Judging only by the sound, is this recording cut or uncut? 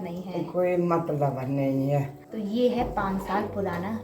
cut